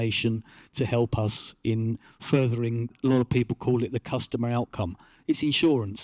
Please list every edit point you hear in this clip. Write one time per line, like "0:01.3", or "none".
0:03.0